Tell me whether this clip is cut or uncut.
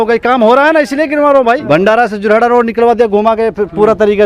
cut